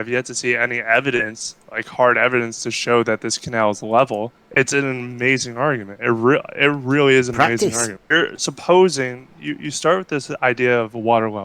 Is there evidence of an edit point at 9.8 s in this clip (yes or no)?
no